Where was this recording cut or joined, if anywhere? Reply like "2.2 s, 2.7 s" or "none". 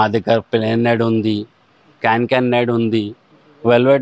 none